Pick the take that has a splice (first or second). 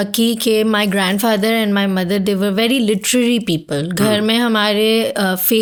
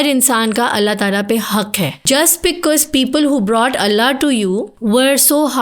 second